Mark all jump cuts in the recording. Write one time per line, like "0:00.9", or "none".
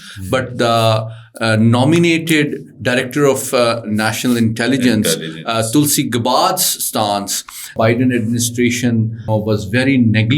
0:07.7
0:09.3